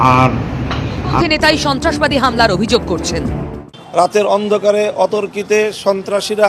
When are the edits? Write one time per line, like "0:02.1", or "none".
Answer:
0:01.2